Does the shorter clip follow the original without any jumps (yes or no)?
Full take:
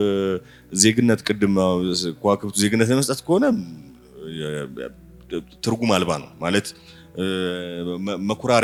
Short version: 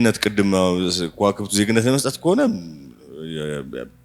yes